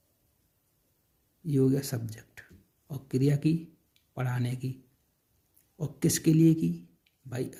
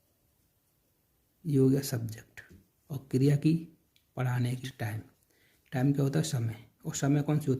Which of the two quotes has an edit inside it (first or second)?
second